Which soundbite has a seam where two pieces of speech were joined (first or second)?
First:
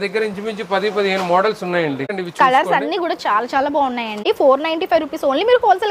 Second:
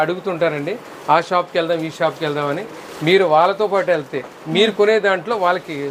first